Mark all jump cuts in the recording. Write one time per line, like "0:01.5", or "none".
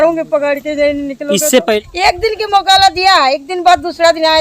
0:01.8